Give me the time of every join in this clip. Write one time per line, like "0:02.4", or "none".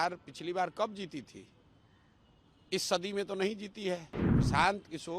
0:04.2